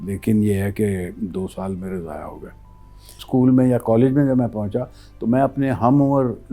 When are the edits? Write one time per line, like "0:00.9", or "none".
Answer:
0:03.2